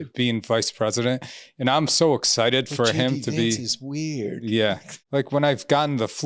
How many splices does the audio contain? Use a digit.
1